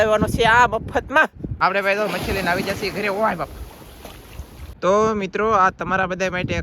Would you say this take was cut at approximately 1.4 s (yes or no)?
yes